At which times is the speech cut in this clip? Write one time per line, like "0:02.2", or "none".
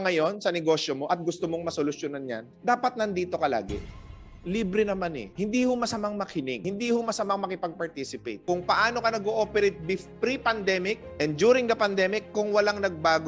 0:04.0
0:05.3
0:06.6
0:08.3